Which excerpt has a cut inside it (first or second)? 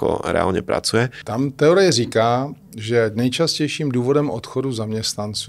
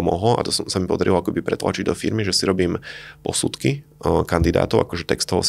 first